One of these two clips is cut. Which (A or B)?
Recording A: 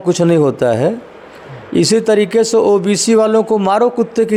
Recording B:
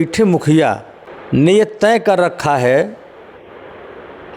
B